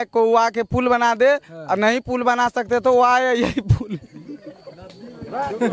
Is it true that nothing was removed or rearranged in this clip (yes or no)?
yes